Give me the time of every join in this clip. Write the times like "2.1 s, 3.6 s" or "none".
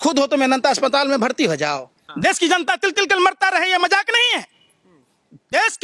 2.0 s